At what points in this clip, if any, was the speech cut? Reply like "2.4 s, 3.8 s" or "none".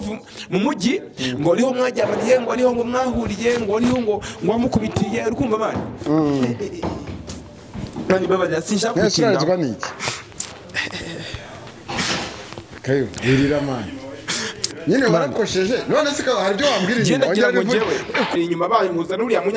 18.3 s